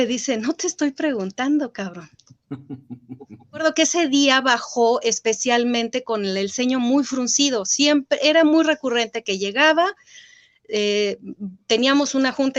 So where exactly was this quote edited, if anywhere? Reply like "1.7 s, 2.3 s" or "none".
3.6 s